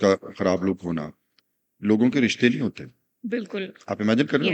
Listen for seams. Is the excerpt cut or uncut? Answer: uncut